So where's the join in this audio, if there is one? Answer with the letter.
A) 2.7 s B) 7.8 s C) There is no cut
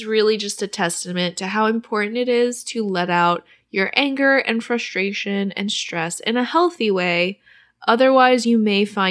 C